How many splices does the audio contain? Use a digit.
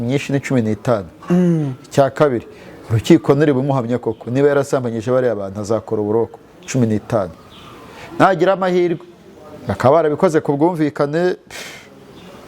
0